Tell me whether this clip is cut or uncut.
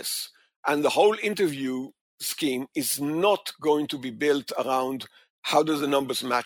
uncut